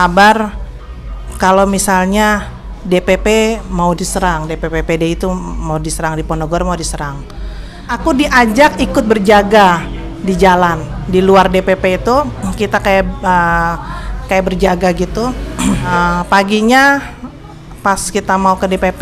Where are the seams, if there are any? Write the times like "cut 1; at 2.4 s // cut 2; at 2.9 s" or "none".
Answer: cut 1; at 7.9 s // cut 2; at 15.9 s